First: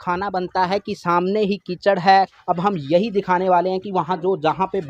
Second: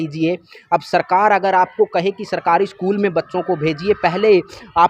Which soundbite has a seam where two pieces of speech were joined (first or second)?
first